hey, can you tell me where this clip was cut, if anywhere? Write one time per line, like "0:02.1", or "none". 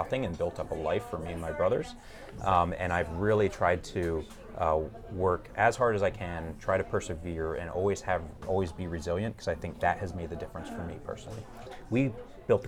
0:11.7